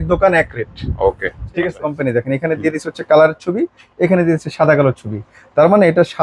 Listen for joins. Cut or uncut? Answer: cut